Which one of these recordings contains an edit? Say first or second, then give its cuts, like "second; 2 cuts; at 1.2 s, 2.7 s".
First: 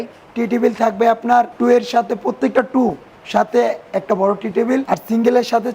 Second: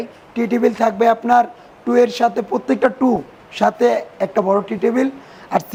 first; 2 cuts; at 1.5 s, 4.8 s